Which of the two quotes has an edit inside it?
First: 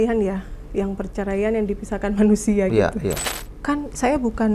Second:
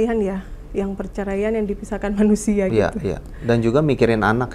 first; 1 cut; at 3.3 s

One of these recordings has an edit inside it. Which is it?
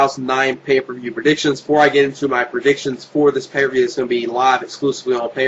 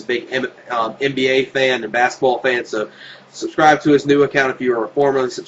second; 1 cut; at 1.1 s

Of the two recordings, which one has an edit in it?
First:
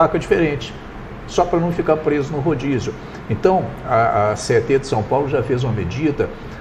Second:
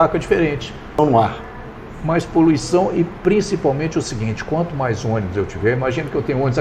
second; 1 cut; at 1.0 s

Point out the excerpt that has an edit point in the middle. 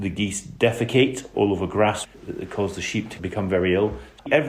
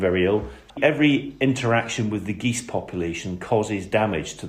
first; 1 cut; at 2.0 s

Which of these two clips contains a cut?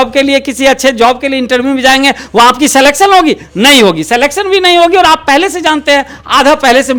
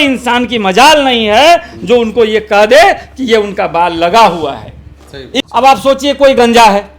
second; 1 cut; at 5.3 s

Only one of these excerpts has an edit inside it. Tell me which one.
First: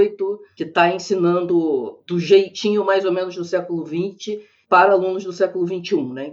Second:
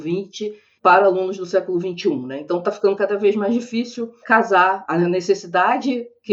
first; 1 cut; at 2.0 s

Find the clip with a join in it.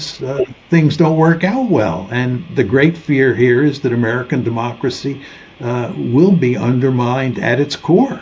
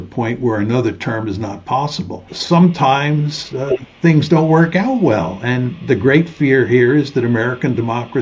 second; 1 cut; at 2.3 s

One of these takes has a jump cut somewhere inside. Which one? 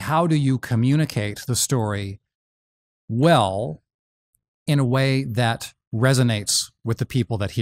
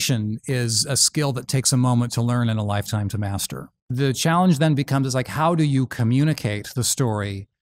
second; 1 cut; at 3.8 s

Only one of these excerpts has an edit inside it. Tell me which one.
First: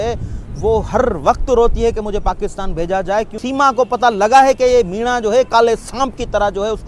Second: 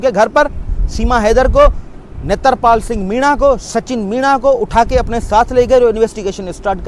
first; 1 cut; at 3.4 s

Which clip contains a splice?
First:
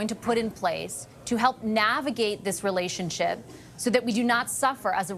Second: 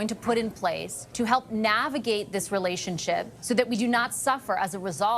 second; 2 cuts; at 1.0 s, 3.3 s

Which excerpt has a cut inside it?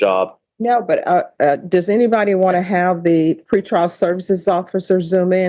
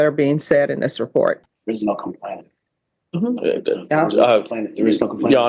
second; 1 cut; at 1.5 s

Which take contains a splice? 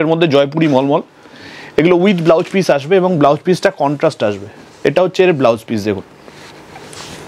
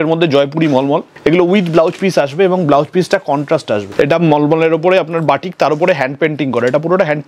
second; 2 cuts; at 1.1 s, 3.9 s

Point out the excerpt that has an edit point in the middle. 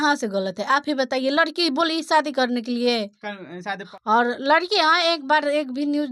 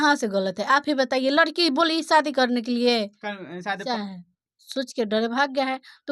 second; 1 cut; at 3.8 s

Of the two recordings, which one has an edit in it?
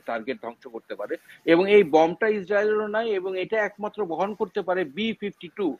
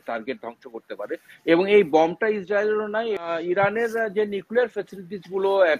second; 1 cut; at 3.2 s

